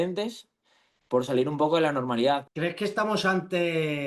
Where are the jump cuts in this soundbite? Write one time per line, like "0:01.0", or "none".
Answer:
0:02.5